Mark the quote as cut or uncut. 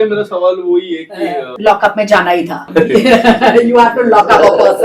cut